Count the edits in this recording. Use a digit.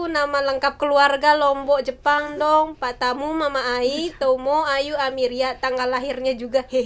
0